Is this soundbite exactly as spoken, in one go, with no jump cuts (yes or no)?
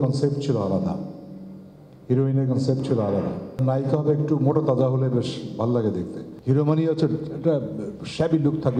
no